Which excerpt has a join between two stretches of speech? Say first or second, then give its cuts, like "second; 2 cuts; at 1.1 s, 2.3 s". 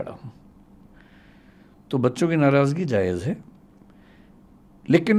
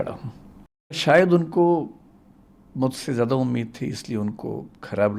second; 1 cut; at 1.0 s